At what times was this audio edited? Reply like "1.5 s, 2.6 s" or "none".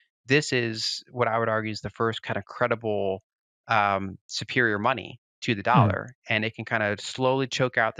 none

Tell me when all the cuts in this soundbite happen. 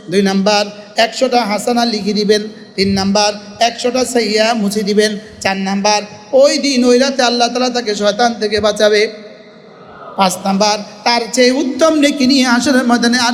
none

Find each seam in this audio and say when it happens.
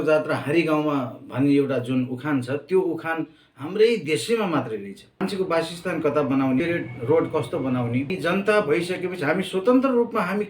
5.0 s, 6.6 s, 8.2 s

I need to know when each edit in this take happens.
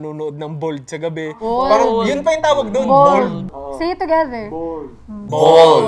none

